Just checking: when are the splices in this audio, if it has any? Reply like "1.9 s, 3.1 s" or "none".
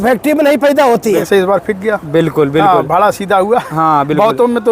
1.2 s